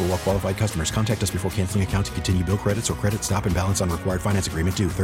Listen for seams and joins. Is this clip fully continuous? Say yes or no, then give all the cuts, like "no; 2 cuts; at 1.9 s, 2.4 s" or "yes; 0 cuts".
yes; 0 cuts